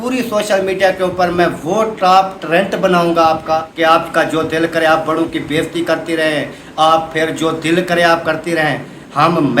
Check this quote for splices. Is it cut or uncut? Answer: cut